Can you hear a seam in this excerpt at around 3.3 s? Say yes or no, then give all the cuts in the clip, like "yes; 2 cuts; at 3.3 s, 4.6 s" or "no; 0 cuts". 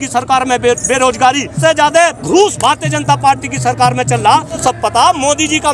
no; 2 cuts; at 2.0 s, 4.6 s